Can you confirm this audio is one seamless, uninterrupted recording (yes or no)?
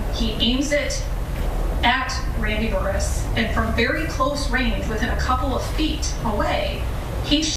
yes